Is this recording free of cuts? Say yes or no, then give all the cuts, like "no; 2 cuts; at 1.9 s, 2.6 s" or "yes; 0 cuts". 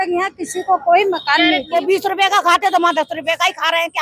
no; 1 cut; at 1.7 s